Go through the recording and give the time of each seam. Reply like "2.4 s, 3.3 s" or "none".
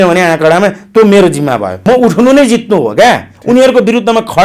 1.7 s